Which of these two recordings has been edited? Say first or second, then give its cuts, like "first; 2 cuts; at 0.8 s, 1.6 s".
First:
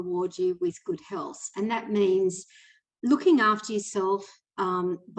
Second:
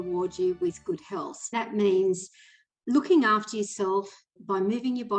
second; 2 cuts; at 1.5 s, 4.3 s